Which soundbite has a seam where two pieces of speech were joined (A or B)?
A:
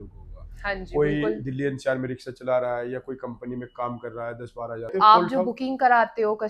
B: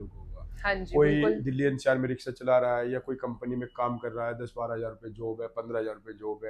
A